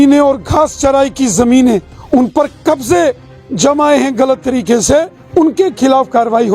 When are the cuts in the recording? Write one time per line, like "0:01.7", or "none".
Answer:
0:01.9
0:05.2